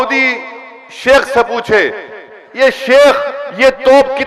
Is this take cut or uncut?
uncut